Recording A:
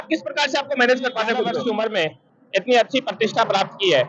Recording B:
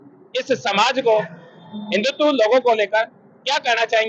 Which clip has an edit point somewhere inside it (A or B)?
A